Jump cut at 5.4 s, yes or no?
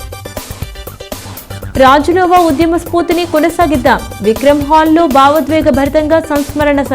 no